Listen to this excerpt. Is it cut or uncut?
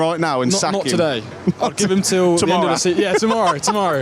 uncut